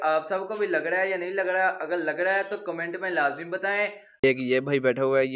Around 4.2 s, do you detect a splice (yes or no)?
yes